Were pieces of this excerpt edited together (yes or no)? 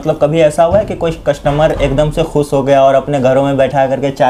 no